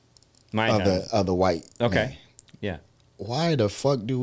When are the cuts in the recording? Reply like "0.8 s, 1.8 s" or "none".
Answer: none